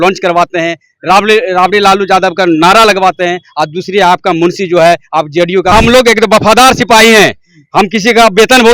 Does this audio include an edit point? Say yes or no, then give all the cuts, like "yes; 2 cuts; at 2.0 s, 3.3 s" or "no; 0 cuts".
yes; 1 cut; at 5.7 s